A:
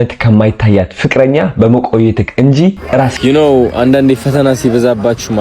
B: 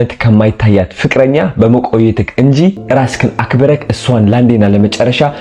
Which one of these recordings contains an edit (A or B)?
A